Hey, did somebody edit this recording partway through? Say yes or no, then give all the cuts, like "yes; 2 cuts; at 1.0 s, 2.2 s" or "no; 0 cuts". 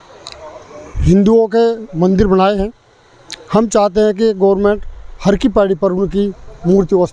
no; 0 cuts